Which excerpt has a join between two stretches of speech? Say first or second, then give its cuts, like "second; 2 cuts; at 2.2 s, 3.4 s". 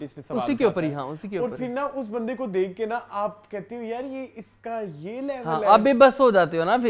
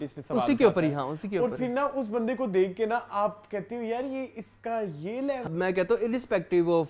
second; 1 cut; at 5.5 s